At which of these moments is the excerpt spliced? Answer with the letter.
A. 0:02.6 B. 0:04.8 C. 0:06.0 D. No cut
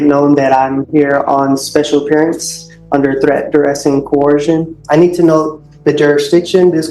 B